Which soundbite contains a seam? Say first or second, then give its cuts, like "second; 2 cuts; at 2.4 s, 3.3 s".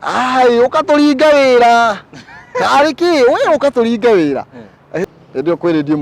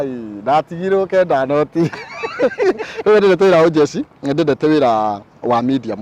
first; 1 cut; at 5.0 s